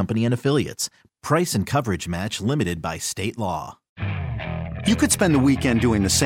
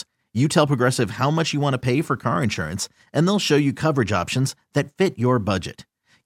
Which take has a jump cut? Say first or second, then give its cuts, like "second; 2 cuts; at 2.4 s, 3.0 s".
first; 1 cut; at 3.8 s